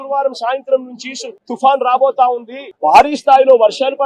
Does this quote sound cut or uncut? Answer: uncut